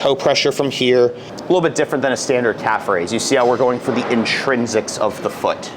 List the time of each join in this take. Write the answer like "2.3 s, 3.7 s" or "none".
1.3 s